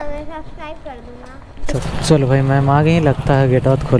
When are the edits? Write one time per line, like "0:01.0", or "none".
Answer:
0:01.6